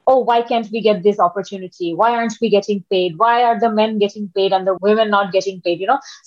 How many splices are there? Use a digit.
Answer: 1